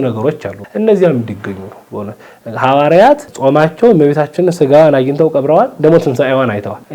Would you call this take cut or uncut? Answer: uncut